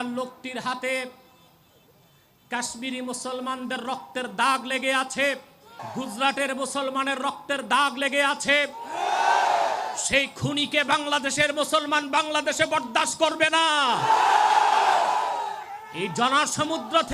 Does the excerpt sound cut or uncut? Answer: cut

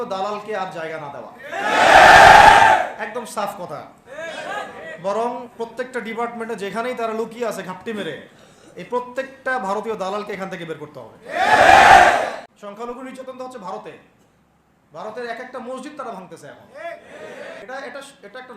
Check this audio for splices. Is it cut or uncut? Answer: cut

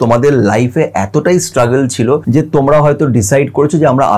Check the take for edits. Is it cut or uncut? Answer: cut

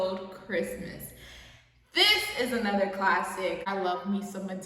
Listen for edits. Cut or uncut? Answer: cut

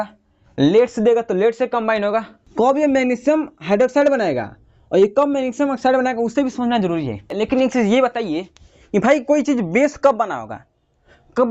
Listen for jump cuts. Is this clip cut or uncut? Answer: cut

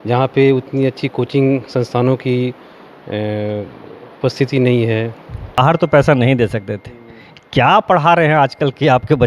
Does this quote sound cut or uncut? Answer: cut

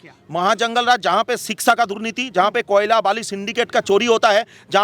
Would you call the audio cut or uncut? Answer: uncut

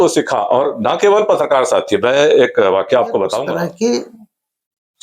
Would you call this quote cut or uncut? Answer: cut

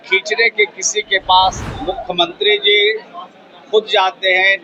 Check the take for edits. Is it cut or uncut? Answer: cut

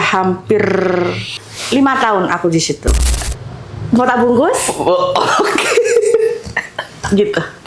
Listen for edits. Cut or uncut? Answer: cut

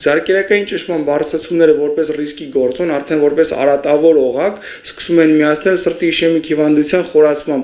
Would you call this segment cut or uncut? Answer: uncut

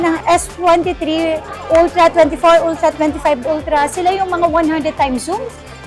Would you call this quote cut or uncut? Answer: uncut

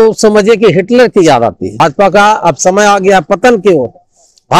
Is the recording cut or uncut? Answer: cut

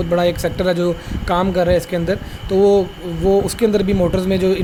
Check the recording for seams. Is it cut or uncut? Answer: uncut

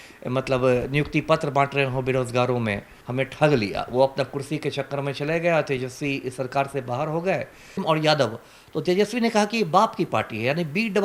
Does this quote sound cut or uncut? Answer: cut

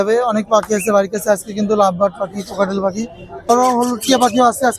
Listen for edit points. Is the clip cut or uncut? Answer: cut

